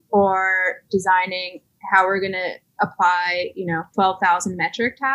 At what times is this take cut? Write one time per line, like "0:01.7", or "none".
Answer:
0:02.6
0:03.9